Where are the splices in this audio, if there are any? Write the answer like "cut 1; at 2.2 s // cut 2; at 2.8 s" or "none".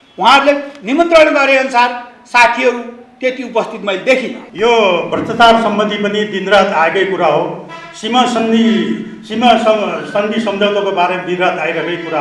cut 1; at 4.4 s